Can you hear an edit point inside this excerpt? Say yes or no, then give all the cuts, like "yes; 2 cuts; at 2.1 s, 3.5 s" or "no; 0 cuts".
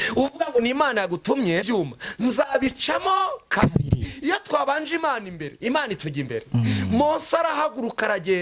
yes; 1 cut; at 1.6 s